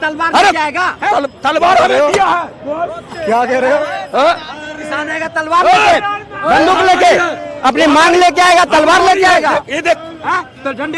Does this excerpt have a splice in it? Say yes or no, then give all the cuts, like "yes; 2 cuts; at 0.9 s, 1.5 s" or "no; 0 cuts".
no; 0 cuts